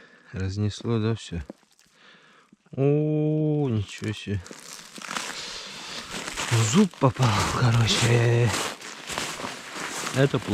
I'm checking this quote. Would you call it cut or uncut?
uncut